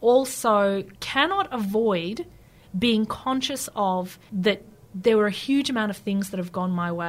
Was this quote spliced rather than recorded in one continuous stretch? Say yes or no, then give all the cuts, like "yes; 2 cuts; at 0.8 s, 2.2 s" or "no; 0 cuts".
yes; 2 cuts; at 1.0 s, 4.2 s